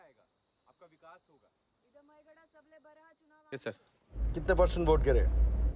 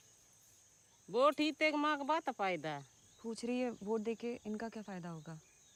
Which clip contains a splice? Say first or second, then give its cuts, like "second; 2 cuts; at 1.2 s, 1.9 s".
first; 1 cut; at 3.4 s